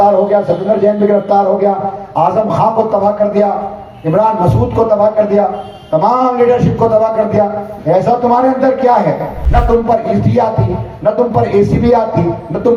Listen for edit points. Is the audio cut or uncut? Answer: cut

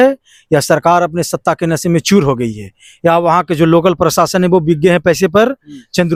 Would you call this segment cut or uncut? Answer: uncut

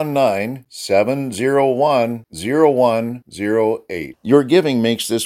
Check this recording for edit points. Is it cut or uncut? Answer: uncut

